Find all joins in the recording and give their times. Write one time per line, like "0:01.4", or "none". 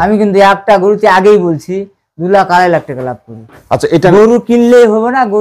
none